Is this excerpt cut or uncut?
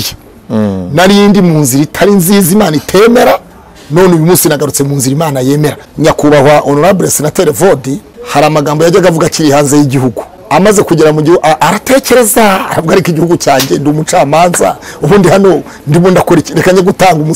cut